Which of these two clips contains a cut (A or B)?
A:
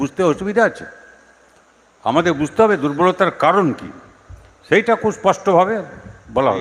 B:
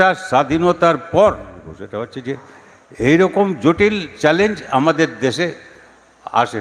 B